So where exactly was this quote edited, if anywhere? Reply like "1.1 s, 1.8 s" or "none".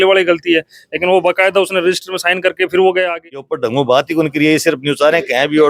3.5 s